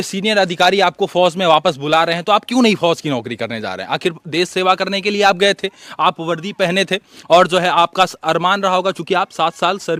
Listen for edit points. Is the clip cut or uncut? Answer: uncut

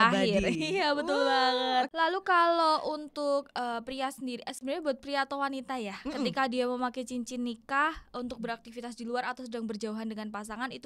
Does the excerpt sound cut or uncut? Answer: cut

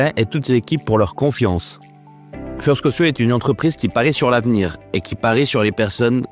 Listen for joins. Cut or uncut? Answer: uncut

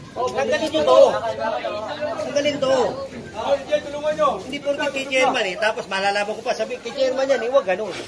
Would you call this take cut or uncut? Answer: uncut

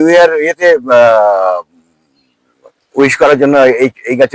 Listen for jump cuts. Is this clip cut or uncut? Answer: uncut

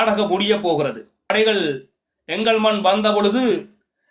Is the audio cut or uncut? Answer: cut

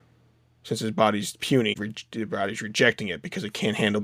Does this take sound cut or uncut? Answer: cut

